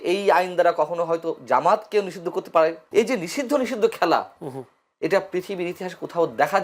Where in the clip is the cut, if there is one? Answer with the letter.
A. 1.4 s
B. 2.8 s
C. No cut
B